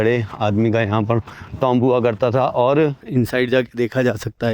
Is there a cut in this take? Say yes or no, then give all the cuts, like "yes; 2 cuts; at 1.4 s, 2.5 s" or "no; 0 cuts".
yes; 1 cut; at 3.0 s